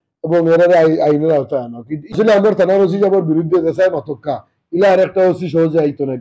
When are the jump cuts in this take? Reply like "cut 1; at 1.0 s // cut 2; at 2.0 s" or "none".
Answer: cut 1; at 2.0 s